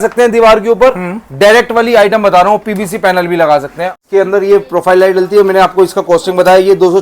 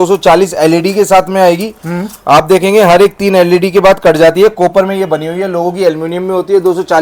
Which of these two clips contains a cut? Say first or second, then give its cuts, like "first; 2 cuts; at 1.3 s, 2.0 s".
first; 1 cut; at 4.0 s